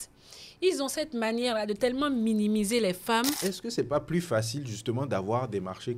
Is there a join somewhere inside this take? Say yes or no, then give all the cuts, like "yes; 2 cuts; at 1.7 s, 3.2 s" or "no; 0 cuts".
yes; 1 cut; at 3.4 s